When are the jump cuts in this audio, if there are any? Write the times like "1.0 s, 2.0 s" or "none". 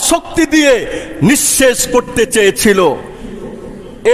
none